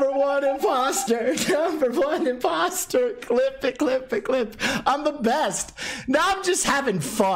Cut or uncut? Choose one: uncut